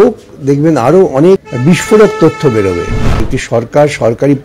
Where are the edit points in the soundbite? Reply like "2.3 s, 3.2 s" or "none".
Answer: 1.5 s, 3.3 s